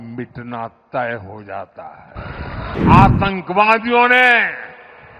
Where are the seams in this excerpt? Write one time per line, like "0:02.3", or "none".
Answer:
0:02.7